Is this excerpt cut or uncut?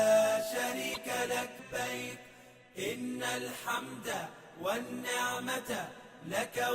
cut